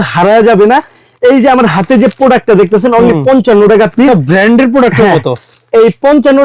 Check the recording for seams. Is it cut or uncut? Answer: uncut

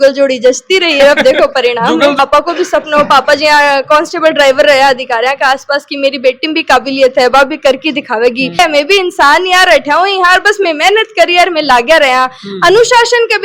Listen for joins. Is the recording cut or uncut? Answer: cut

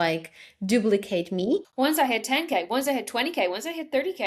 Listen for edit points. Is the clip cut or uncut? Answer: cut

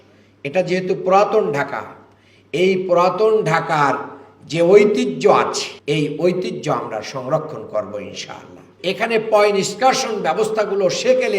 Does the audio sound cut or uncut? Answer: cut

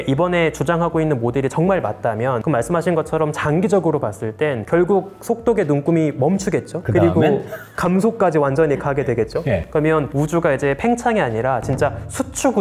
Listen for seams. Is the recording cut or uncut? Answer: uncut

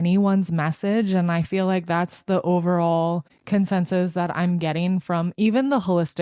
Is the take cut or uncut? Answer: uncut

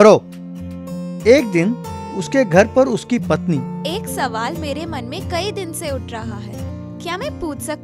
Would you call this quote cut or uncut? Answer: uncut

